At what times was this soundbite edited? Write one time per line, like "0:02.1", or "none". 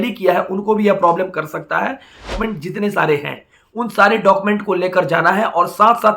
0:02.4